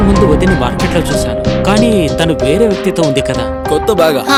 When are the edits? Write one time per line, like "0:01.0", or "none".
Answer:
none